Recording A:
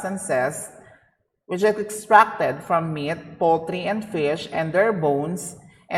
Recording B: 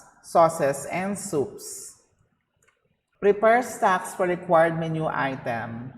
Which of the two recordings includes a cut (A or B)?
B